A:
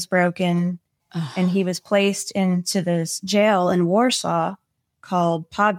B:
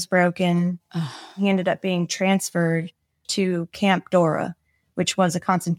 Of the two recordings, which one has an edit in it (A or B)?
B